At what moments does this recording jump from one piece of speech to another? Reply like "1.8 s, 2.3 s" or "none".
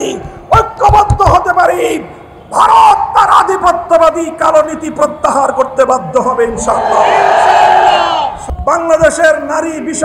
8.4 s